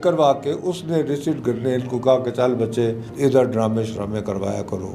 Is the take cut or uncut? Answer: uncut